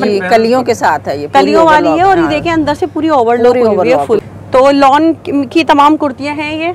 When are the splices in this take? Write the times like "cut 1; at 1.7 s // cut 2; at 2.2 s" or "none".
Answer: cut 1; at 4.3 s